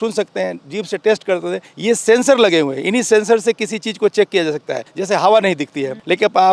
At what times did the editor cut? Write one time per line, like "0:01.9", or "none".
none